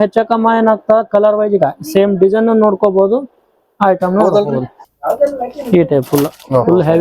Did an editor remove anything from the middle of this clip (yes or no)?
yes